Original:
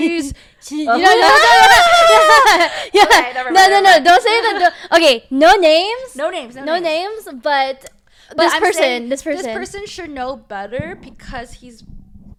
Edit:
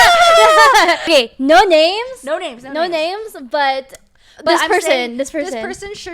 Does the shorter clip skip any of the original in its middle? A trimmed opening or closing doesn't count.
yes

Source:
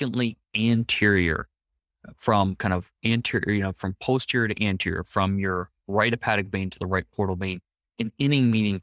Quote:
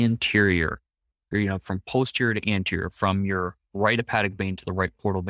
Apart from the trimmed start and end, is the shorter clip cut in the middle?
yes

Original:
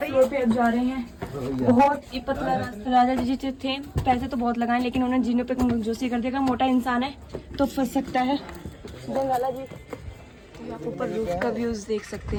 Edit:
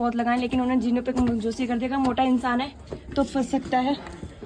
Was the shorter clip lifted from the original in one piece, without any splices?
yes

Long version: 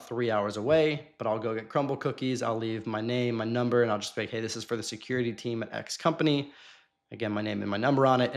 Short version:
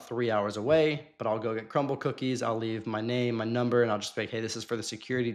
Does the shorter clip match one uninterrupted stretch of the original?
yes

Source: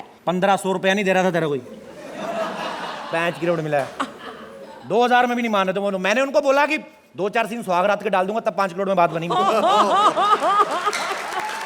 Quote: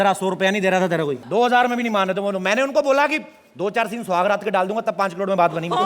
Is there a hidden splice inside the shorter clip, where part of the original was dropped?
yes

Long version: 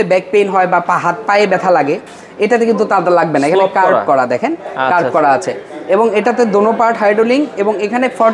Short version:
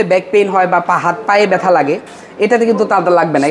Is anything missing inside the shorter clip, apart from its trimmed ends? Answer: no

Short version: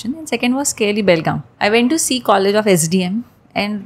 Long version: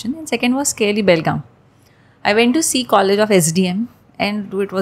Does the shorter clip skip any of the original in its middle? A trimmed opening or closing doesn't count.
yes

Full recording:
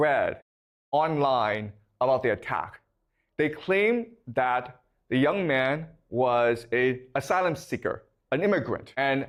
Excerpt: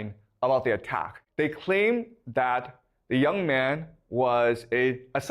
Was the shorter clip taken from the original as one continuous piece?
no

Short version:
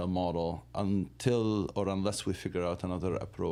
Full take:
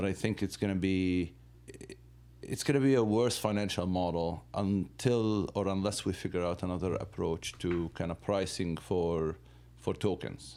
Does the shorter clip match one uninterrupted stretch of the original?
yes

